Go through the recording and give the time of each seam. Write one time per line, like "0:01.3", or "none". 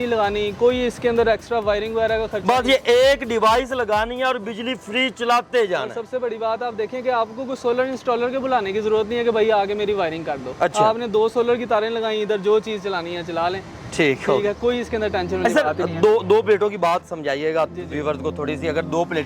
none

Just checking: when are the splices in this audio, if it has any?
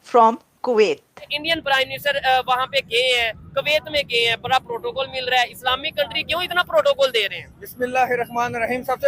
0:01.4

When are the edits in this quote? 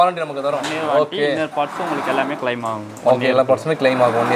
none

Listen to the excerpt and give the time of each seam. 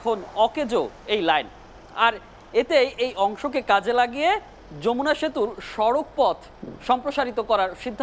none

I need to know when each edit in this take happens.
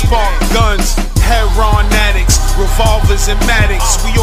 none

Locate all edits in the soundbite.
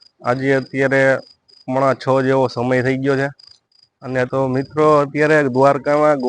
0:04.3

